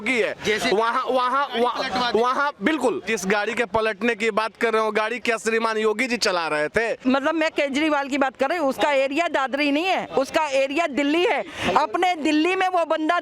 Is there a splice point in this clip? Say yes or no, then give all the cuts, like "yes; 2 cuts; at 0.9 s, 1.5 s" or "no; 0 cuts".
yes; 2 cuts; at 3.1 s, 7.0 s